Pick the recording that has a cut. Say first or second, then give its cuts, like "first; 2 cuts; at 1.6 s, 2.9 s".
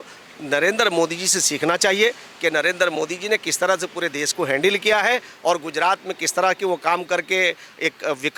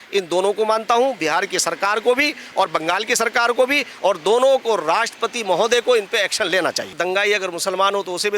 second; 1 cut; at 7.0 s